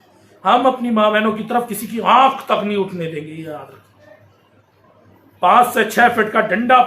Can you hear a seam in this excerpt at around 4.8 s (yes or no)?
yes